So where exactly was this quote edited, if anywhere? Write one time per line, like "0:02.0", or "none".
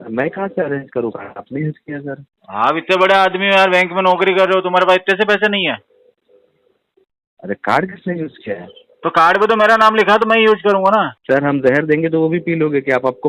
0:11.2